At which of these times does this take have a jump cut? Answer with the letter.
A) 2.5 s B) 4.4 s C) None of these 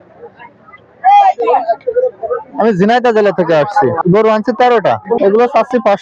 C